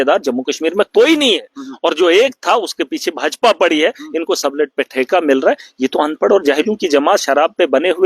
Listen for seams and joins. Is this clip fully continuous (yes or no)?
yes